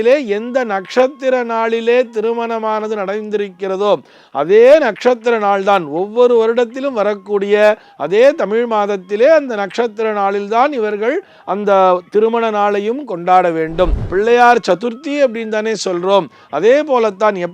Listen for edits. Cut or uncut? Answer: cut